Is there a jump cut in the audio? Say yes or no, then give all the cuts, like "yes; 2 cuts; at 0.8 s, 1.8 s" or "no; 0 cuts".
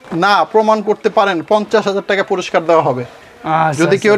no; 0 cuts